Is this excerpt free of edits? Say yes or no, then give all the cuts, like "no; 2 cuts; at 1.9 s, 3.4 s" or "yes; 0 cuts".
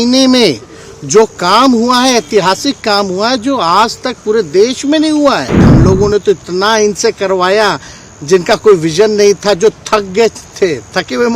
no; 1 cut; at 5.7 s